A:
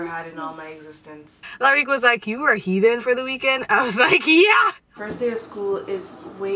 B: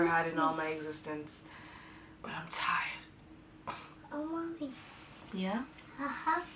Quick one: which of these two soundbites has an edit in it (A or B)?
A